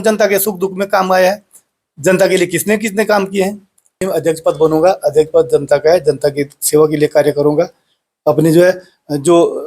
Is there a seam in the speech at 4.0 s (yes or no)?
yes